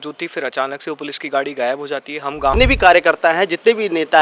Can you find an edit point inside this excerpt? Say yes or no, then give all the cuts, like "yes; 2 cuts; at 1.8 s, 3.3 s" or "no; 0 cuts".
yes; 1 cut; at 2.5 s